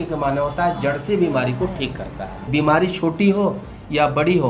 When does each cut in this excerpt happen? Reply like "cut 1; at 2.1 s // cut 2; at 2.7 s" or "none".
cut 1; at 2.5 s